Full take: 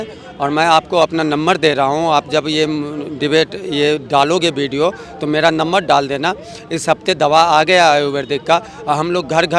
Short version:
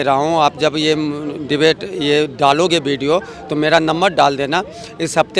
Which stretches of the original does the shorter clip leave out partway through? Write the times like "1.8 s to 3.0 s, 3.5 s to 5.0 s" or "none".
none